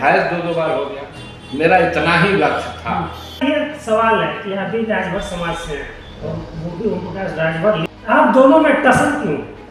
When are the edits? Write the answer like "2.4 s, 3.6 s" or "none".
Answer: 3.4 s, 7.9 s